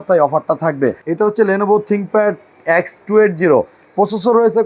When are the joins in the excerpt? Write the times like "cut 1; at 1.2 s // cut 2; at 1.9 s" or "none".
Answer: cut 1; at 1.0 s